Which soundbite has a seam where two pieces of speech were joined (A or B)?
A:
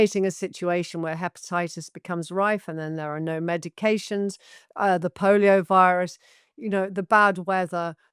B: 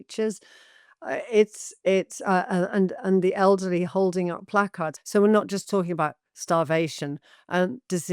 B